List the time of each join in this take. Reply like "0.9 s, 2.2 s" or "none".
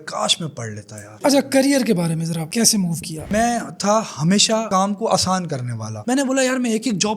1.0 s, 3.3 s